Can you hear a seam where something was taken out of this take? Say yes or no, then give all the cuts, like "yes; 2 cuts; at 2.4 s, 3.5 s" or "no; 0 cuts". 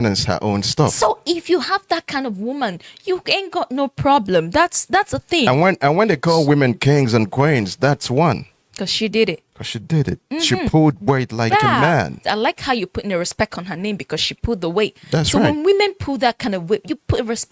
no; 0 cuts